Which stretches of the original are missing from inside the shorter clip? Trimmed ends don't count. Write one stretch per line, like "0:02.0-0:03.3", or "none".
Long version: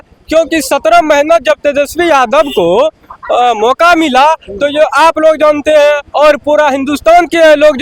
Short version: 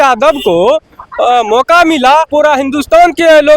0:04.4-0:06.4